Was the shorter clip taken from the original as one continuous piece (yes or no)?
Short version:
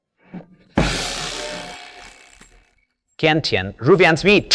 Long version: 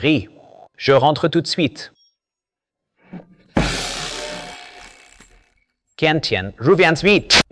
yes